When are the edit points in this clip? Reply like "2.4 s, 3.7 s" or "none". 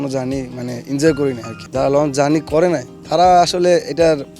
1.5 s